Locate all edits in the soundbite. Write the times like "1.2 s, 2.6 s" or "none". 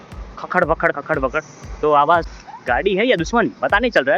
2.3 s